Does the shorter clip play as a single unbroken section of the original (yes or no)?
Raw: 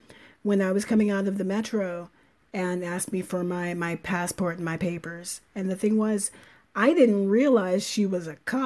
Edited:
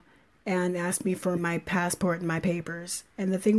no